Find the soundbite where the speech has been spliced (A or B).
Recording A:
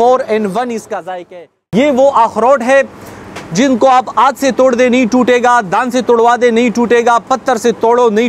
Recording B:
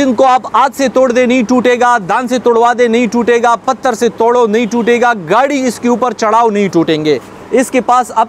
A